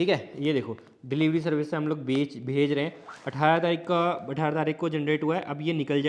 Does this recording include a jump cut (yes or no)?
no